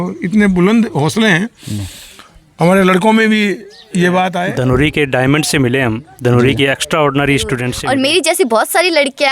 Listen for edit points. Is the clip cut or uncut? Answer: cut